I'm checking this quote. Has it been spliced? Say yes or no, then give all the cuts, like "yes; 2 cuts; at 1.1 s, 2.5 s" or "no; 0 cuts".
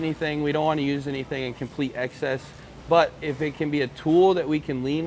no; 0 cuts